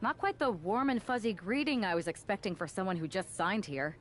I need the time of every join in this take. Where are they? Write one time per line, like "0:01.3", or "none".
none